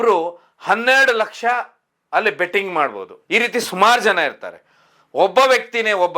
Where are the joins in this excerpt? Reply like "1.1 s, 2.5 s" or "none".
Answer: 3.1 s